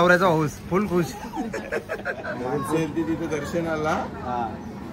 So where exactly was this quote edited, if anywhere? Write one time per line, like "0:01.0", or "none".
0:02.1